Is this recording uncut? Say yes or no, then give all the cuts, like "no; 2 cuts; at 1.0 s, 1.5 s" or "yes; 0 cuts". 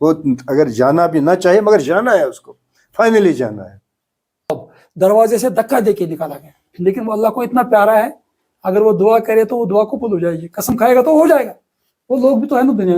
no; 1 cut; at 4.5 s